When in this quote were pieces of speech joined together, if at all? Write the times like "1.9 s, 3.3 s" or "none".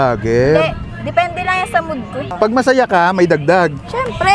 2.2 s